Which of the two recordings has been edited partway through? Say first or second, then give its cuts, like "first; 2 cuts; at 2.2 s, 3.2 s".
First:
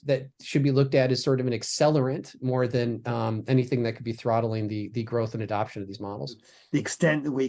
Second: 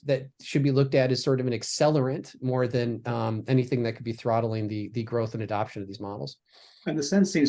first; 1 cut; at 6.5 s